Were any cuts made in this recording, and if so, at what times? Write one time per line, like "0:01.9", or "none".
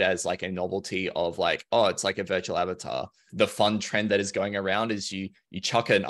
0:03.3